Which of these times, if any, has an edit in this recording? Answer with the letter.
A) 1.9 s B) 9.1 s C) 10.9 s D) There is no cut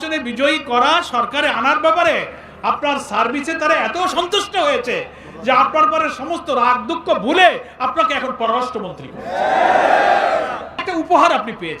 C